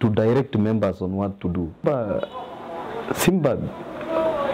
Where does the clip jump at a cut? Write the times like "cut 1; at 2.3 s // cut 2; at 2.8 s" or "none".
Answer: cut 1; at 1.8 s